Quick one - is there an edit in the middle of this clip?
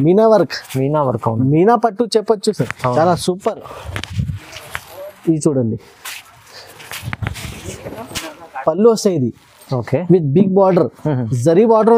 yes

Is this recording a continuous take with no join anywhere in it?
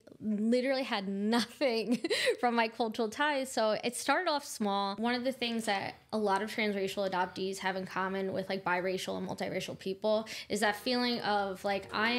no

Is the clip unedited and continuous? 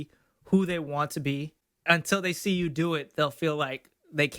no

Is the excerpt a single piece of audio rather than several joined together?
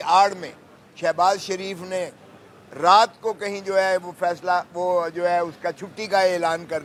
yes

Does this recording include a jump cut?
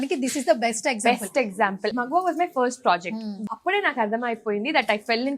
yes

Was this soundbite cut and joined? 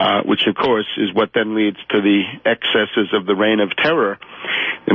yes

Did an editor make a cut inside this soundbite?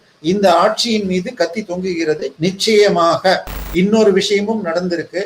yes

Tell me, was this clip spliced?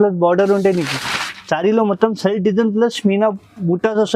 no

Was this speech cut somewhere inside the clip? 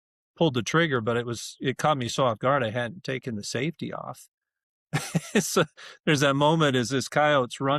no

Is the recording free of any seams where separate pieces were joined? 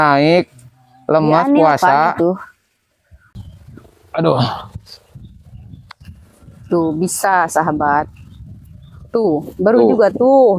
no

